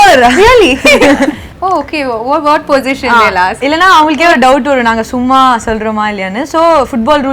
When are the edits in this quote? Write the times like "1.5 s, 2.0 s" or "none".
1.4 s